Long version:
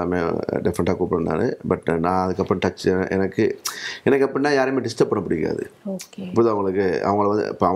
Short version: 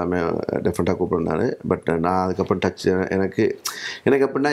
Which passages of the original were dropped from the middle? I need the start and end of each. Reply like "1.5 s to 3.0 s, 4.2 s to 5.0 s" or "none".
none

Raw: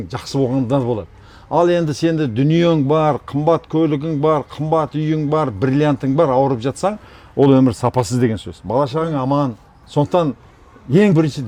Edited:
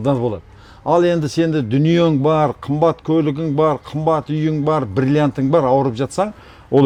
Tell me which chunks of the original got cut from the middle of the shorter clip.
none

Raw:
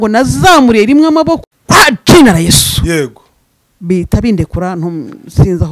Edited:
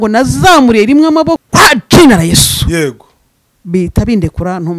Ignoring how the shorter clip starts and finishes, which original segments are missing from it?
1.4 s to 1.6 s

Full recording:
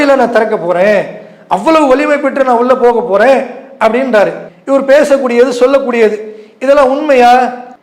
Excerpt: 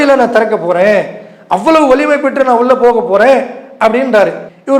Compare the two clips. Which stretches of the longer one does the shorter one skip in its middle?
none

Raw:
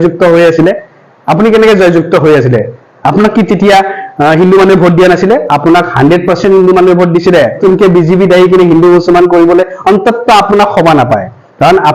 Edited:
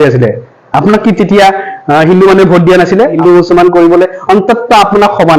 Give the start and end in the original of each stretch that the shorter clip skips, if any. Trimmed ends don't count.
5.5 s to 8.7 s

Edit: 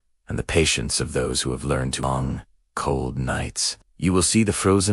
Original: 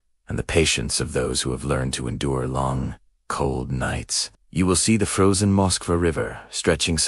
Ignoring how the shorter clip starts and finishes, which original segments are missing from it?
2.0 s to 2.6 s

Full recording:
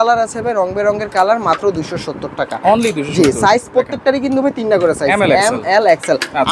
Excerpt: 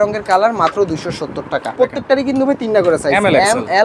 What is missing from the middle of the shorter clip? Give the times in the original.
2.6 s to 3.7 s

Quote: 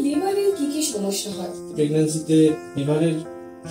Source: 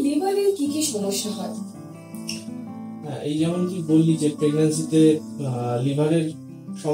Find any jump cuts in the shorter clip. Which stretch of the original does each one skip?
1.7 s to 4.4 s, 5.4 s to 5.9 s

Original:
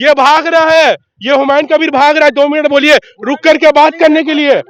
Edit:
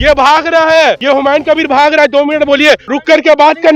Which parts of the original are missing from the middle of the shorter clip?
1.0 s to 1.2 s, 3.1 s to 3.3 s

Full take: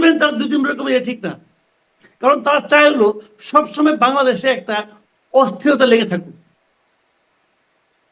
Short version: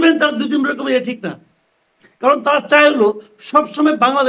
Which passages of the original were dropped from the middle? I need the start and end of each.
none

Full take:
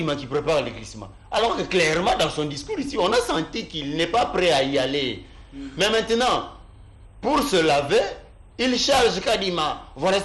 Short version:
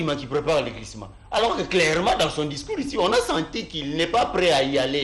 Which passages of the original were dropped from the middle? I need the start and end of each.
none

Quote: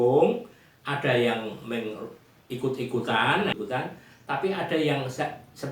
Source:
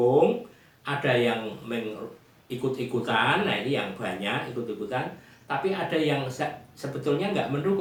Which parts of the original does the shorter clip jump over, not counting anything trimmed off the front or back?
3.6 s to 4.8 s

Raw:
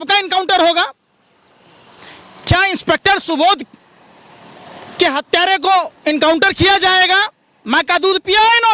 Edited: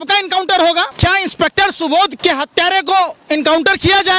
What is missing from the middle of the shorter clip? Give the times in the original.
0.9 s to 2.4 s, 3.6 s to 4.9 s

